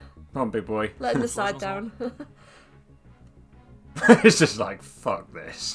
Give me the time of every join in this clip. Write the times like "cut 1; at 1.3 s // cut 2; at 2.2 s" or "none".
none